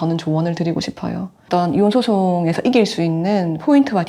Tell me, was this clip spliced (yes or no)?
yes